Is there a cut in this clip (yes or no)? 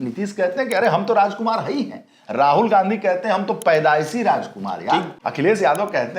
yes